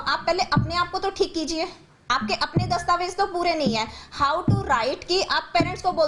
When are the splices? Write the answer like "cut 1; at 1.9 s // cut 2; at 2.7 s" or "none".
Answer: none